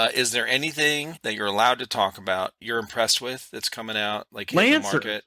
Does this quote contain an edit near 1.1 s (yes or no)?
yes